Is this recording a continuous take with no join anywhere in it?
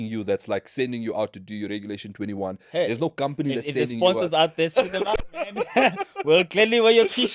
yes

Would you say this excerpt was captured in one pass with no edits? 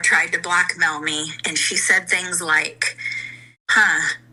yes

